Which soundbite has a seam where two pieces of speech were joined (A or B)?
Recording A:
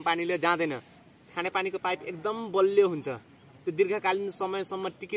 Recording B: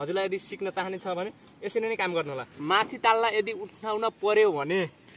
B